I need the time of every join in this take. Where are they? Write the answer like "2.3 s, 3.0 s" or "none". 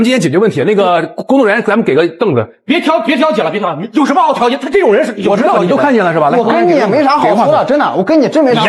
none